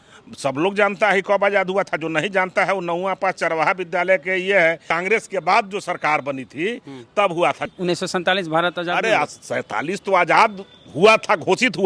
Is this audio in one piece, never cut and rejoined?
no; 2 cuts; at 4.9 s, 7.7 s

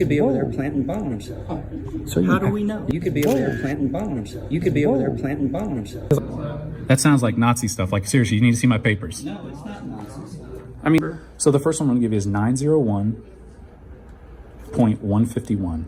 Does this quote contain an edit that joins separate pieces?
yes; 2 cuts; at 6.3 s, 11.0 s

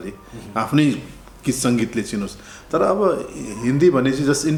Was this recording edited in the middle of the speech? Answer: no; 0 cuts

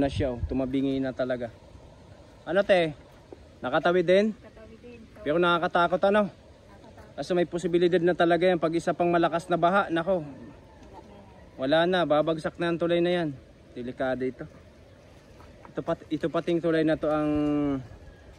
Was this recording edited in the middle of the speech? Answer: no; 0 cuts

